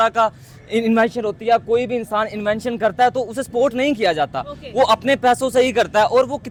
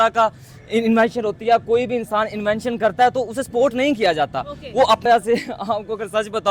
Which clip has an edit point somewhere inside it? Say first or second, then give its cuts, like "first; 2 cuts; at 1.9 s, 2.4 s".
second; 1 cut; at 5.0 s